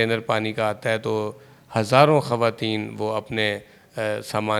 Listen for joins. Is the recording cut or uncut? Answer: uncut